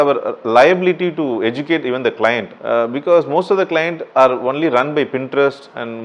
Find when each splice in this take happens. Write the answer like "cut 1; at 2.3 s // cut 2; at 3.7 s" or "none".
cut 1; at 2.5 s // cut 2; at 4.0 s